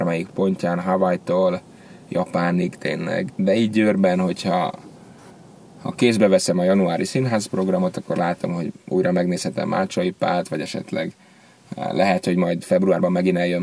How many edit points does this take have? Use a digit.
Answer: 1